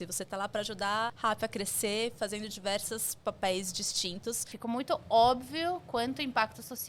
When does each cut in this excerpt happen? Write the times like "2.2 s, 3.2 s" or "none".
1.1 s, 4.5 s